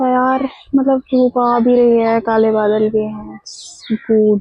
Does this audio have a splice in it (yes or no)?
no